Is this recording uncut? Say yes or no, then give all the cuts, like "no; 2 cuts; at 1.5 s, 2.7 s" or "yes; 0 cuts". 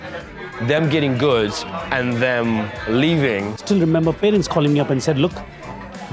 no; 1 cut; at 3.6 s